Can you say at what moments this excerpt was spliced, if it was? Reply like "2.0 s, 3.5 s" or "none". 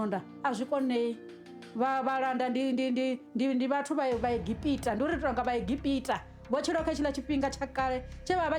none